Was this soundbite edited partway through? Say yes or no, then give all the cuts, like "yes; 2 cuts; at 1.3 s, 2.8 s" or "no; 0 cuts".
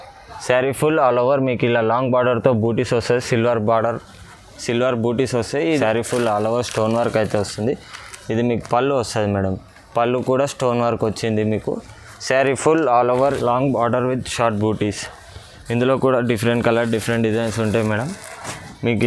yes; 2 cuts; at 5.8 s, 13.4 s